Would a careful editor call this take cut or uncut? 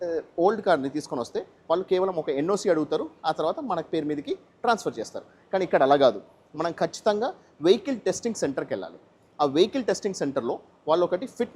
uncut